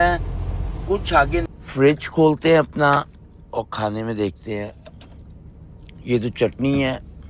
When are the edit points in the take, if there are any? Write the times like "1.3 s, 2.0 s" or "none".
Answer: 1.5 s